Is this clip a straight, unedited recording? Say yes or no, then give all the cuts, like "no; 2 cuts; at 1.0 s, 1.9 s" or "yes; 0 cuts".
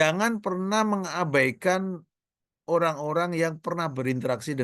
yes; 0 cuts